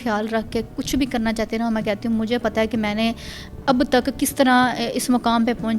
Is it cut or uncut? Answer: uncut